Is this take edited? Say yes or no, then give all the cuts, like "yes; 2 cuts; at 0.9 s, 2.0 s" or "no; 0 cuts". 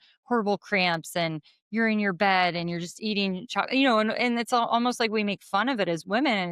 no; 0 cuts